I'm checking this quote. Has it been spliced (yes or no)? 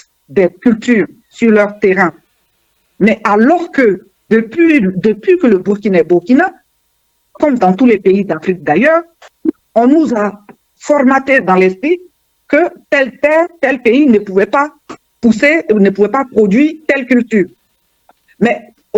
no